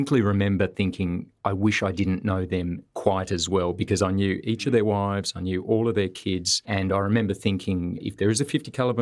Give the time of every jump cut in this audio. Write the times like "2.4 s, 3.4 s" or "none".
none